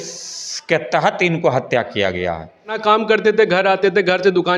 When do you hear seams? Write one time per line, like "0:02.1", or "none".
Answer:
0:02.8